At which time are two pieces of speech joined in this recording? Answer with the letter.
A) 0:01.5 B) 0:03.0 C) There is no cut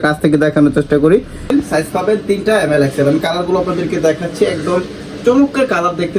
A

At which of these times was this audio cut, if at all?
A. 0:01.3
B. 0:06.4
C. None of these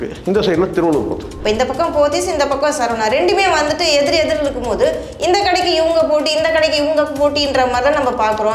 A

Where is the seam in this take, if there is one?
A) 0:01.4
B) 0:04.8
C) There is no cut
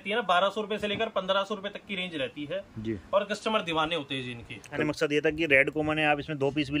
B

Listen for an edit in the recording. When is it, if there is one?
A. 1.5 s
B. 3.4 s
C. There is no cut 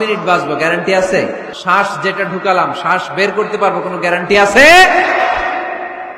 A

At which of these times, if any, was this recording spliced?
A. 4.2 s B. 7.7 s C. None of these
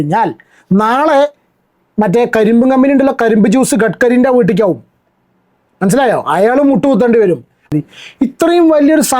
B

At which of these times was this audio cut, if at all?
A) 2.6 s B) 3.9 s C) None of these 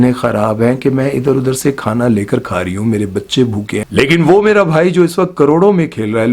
B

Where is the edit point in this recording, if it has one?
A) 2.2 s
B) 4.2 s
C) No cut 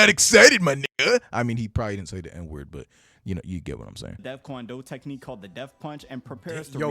B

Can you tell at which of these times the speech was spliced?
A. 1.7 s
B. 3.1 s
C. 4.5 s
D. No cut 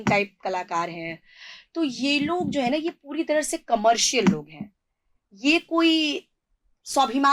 D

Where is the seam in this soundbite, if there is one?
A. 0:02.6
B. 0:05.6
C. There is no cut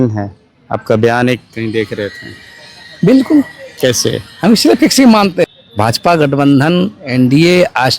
B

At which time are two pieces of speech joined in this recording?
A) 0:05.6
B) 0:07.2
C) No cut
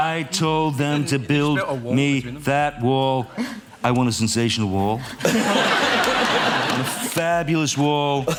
C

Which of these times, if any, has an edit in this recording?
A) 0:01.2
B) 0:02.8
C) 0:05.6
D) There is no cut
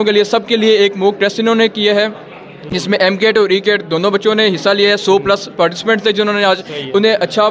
D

